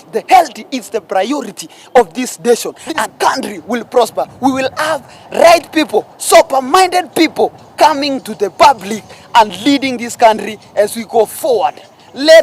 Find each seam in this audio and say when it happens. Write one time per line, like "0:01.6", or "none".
0:03.0